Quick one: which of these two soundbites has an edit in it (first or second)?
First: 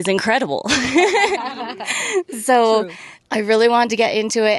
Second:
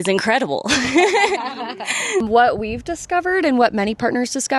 second